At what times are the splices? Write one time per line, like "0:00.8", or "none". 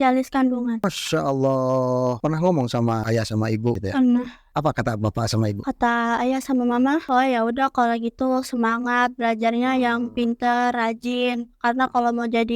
0:02.2
0:03.8
0:04.4